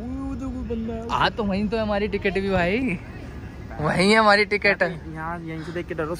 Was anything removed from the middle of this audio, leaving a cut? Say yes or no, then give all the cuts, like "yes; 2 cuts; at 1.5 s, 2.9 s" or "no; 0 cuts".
no; 0 cuts